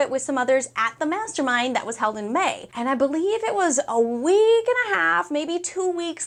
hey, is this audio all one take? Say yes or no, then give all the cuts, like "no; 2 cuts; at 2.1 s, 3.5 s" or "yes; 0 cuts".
yes; 0 cuts